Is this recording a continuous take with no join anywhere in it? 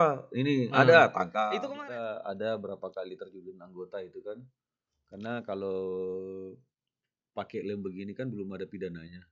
no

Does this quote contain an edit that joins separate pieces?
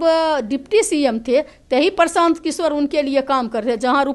no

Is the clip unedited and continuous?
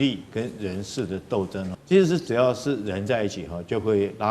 no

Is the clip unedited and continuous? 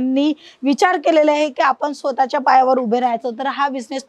yes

